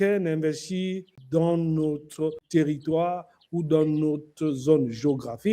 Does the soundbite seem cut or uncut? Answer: cut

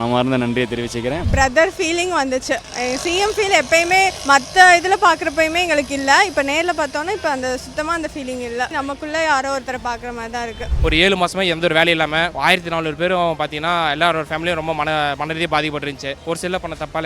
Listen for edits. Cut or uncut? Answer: cut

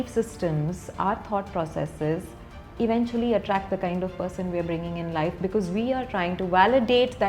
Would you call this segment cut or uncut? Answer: uncut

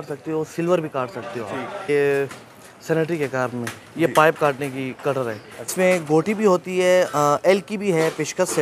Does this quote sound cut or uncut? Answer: cut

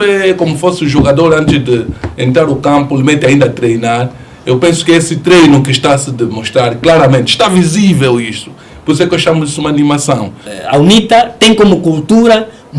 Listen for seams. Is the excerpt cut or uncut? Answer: cut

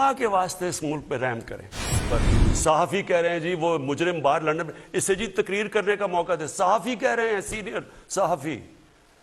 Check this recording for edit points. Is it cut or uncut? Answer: cut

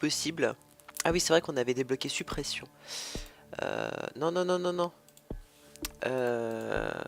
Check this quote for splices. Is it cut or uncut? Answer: uncut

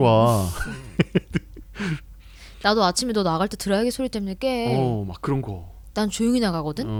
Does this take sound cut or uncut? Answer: uncut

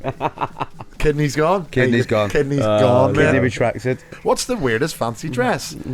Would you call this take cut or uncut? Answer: cut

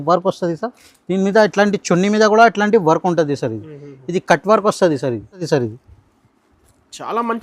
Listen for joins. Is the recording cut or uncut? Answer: cut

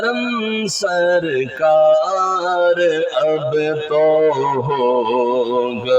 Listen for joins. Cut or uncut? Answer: uncut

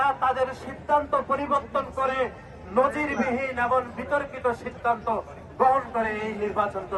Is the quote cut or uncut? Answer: uncut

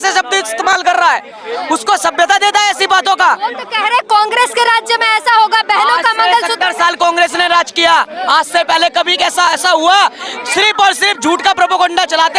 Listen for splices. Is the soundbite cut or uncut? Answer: uncut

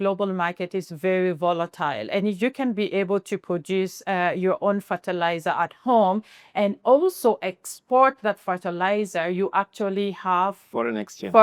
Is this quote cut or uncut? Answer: uncut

